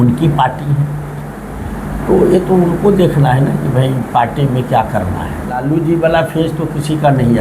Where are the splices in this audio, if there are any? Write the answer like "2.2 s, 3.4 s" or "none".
5.6 s